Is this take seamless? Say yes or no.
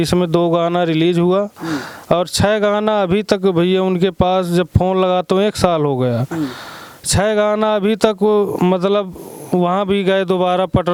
yes